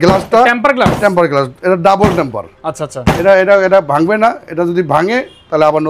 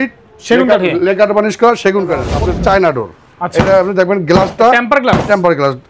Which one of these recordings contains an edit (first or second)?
second